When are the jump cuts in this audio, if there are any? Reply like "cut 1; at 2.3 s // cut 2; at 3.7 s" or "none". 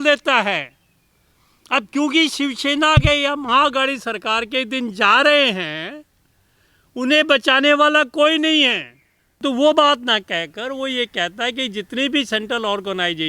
cut 1; at 9.4 s